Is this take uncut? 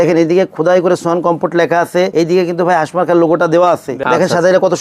no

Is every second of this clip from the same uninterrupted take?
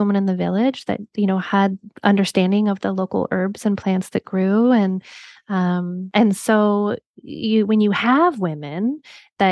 no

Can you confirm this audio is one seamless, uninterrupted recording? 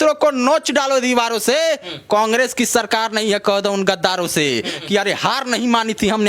no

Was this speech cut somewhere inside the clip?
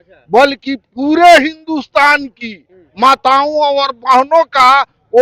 no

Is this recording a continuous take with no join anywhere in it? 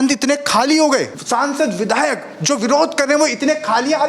no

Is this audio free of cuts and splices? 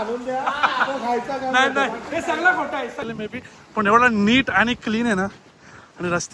no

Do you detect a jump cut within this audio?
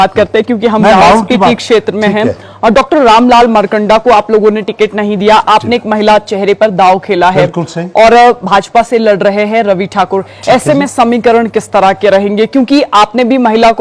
no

